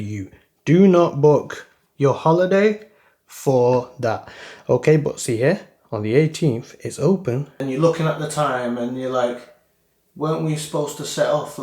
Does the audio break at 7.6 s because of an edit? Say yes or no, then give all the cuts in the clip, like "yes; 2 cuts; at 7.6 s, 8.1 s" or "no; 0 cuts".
yes; 1 cut; at 7.6 s